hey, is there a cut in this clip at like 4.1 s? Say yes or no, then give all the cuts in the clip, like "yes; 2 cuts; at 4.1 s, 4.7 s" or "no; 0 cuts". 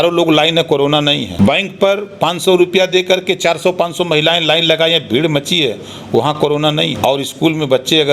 no; 2 cuts; at 1.3 s, 7.0 s